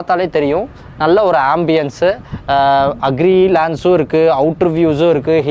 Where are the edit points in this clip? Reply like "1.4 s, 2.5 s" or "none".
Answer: none